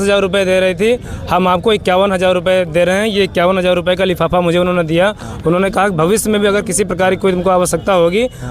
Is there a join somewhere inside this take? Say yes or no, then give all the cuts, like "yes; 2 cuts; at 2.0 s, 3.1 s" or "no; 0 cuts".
no; 0 cuts